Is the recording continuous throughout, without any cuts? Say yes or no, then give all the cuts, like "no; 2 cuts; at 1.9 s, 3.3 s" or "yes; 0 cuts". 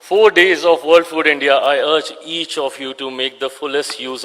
yes; 0 cuts